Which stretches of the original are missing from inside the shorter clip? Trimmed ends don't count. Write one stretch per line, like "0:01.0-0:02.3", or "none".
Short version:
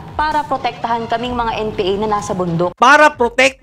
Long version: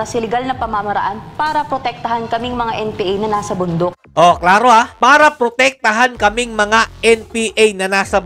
0:03.9-0:04.9